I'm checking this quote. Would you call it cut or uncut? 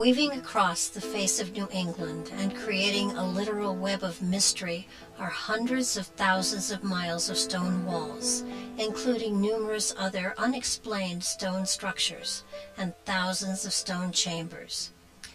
cut